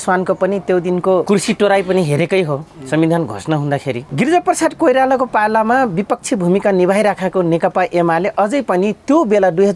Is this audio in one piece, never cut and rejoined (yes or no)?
no